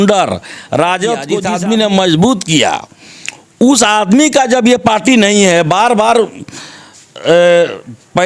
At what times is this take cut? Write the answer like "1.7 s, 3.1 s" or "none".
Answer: 1.4 s